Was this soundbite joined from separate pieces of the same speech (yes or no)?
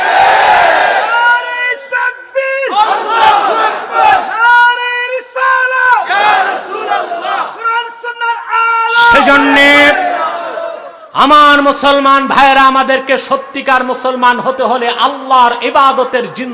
no